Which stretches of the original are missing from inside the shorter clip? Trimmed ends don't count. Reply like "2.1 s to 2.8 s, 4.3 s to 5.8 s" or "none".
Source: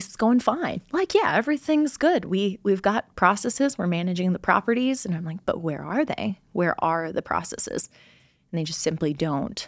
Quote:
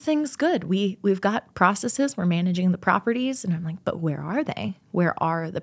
none